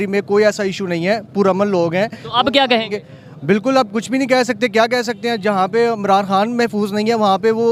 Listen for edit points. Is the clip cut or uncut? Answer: uncut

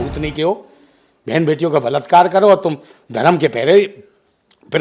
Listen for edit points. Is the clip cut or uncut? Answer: uncut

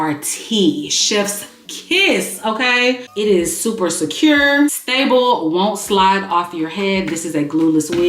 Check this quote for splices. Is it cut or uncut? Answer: cut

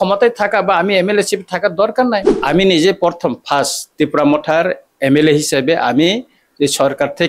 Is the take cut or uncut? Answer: cut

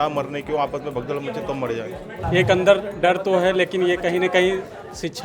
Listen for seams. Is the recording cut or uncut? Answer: cut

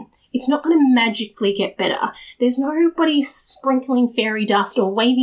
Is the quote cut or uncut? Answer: uncut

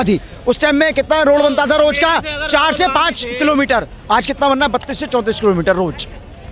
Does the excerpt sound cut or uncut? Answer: uncut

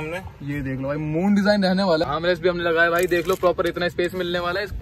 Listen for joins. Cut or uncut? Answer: cut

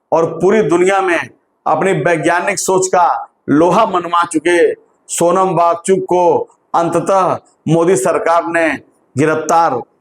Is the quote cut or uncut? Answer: uncut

